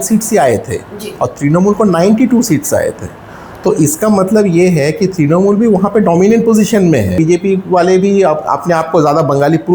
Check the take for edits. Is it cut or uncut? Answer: cut